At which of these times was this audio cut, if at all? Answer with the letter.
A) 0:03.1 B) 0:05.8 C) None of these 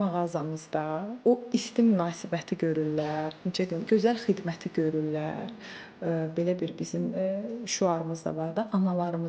C